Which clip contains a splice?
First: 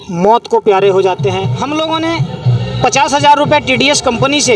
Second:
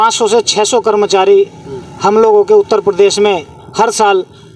first; 1 cut; at 1.5 s

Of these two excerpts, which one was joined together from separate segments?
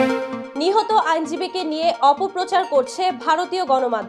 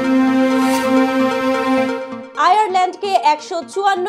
second; 1 cut; at 2.1 s

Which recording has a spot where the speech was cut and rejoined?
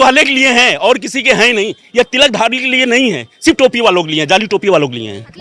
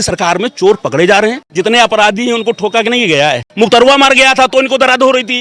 second; 2 cuts; at 1.5 s, 3.5 s

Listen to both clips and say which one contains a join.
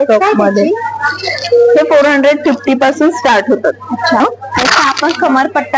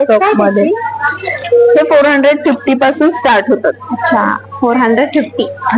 first; 1 cut; at 4.2 s

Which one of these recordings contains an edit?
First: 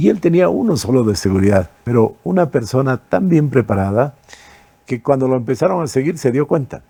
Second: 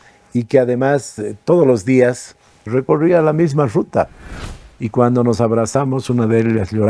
second; 1 cut; at 4.2 s

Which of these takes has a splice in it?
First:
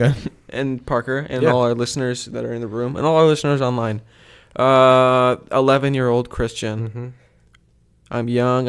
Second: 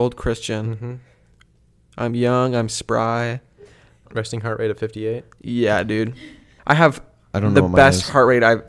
second; 2 cuts; at 4.0 s, 6.5 s

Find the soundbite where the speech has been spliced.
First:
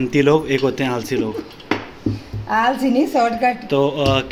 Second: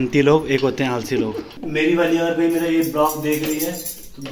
second; 1 cut; at 1.5 s

